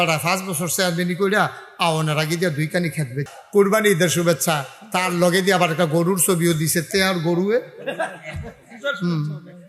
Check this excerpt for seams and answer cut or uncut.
cut